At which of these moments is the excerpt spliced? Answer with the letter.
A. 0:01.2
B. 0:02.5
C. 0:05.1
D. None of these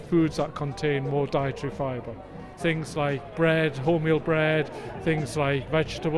B